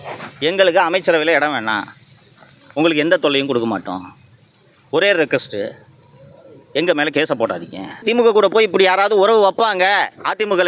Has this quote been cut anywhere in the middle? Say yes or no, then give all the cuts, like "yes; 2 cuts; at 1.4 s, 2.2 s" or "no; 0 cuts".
yes; 1 cut; at 8.0 s